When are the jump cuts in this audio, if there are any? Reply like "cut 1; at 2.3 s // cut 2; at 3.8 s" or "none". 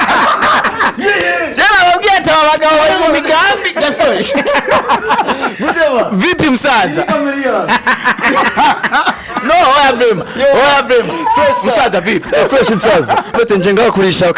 cut 1; at 13.3 s